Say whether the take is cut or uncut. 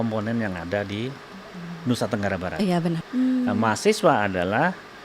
cut